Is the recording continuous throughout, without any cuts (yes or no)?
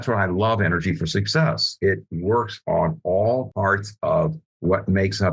no